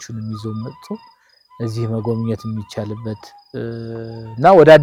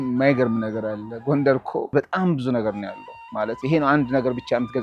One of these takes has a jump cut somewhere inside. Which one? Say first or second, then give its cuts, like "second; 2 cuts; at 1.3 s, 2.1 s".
second; 1 cut; at 1.9 s